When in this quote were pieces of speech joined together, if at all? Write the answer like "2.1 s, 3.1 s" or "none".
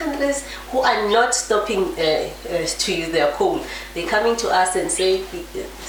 none